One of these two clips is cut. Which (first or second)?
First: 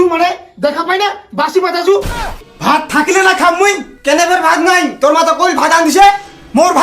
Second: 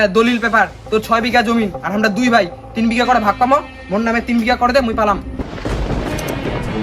first